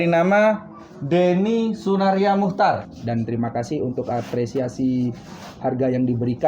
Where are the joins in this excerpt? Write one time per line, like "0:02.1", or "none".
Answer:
0:02.9